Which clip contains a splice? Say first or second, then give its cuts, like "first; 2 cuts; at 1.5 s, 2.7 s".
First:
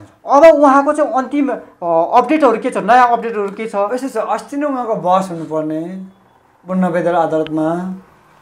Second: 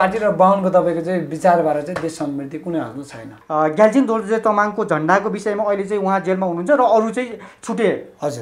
second; 1 cut; at 3.3 s